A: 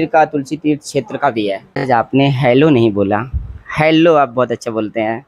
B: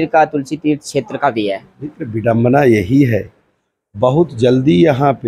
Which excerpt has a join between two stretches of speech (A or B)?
A